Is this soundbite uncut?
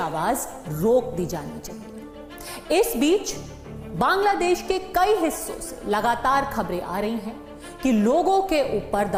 yes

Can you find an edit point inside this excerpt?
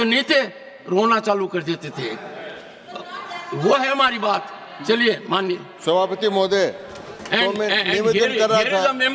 no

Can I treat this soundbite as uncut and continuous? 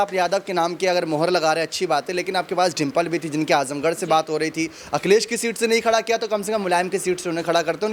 yes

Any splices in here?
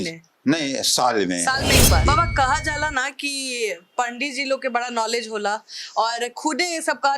yes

